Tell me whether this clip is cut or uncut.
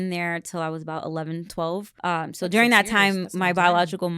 cut